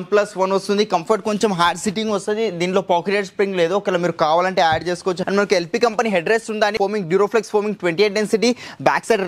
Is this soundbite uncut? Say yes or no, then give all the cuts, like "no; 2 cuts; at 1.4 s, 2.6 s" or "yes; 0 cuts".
no; 2 cuts; at 5.2 s, 6.7 s